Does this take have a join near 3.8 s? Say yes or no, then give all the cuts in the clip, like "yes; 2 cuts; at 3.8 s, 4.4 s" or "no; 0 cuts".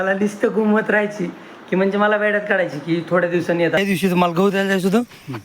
yes; 1 cut; at 3.8 s